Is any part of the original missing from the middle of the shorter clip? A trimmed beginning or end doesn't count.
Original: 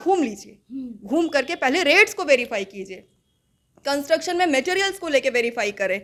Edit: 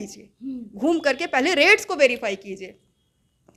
no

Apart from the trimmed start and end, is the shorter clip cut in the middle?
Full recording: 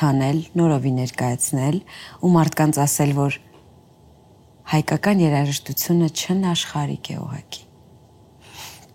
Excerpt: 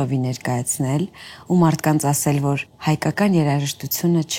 yes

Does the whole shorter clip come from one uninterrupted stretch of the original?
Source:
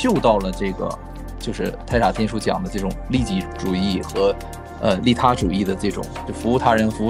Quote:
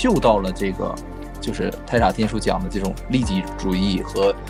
yes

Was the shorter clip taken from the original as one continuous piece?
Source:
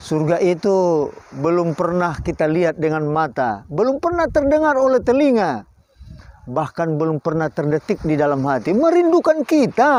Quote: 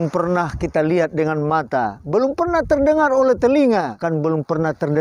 no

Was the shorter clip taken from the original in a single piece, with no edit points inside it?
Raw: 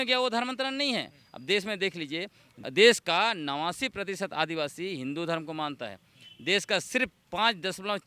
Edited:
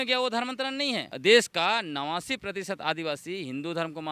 no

